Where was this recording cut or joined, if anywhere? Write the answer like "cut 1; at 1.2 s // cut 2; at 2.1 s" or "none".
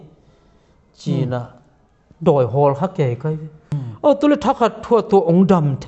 cut 1; at 3.6 s